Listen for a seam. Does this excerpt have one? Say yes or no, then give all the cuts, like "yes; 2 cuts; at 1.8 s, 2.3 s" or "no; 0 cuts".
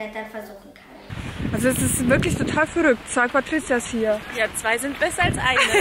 yes; 1 cut; at 1.1 s